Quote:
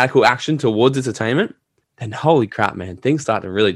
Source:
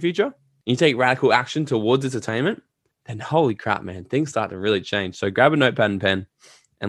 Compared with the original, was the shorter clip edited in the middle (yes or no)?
no